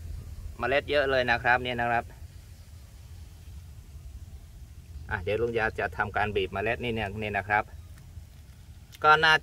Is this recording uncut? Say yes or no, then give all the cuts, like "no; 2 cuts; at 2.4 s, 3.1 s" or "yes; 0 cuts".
yes; 0 cuts